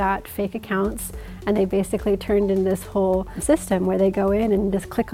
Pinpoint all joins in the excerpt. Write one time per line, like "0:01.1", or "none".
0:03.4